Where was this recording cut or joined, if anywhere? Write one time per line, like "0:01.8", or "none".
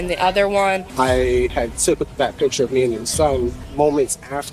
0:00.9
0:01.5
0:03.6